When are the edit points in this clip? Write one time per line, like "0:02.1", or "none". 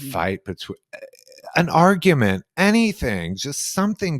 none